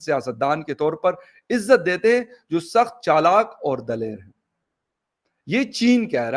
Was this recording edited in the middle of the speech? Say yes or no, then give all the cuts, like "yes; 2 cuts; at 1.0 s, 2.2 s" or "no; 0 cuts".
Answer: no; 0 cuts